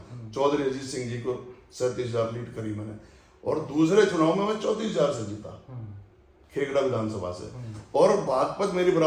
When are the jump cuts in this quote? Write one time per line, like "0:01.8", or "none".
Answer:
none